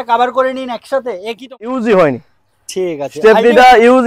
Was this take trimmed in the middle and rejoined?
yes; 1 cut; at 1.5 s

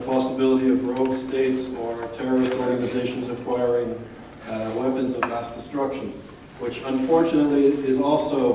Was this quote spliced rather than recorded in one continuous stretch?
yes; 1 cut; at 2.1 s

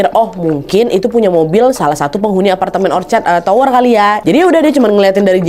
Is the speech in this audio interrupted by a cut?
yes; 1 cut; at 4.2 s

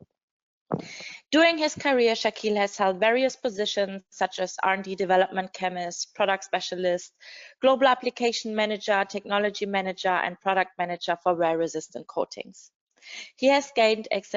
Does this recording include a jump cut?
no; 0 cuts

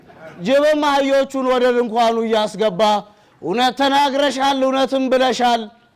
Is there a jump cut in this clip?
no; 0 cuts

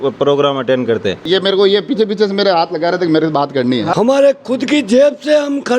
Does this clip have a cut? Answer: yes; 2 cuts; at 1.2 s, 3.9 s

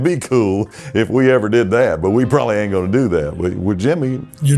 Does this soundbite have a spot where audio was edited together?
no; 0 cuts

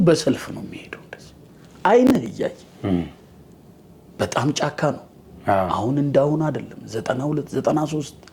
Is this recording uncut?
yes; 0 cuts

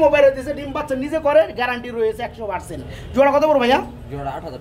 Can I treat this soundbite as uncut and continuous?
yes; 0 cuts

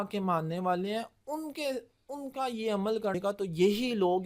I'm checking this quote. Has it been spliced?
yes; 1 cut; at 3.1 s

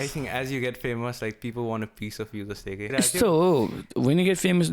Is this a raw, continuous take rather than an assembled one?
no; 1 cut; at 2.9 s

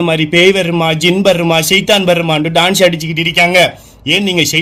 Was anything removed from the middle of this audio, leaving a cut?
no; 0 cuts

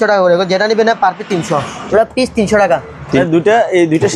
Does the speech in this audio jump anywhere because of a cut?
yes; 2 cuts; at 1.8 s, 3.2 s

